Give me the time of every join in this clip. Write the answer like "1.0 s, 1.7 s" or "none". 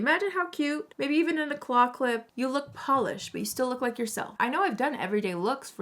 0.9 s, 2.3 s, 4.3 s